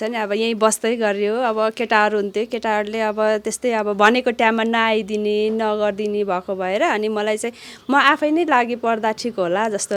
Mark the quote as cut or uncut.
uncut